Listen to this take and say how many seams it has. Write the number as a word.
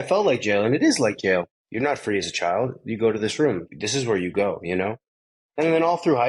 two